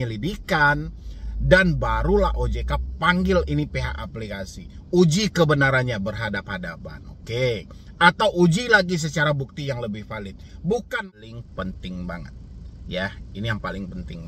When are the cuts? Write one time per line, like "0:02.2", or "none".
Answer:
0:10.9